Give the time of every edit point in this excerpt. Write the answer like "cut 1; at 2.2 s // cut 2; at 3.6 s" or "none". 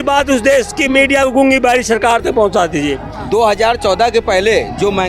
cut 1; at 3.1 s